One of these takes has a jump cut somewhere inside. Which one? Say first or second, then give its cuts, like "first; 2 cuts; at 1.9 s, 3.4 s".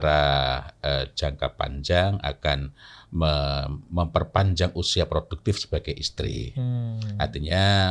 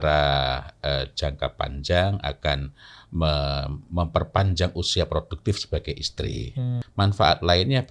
second; 1 cut; at 6.8 s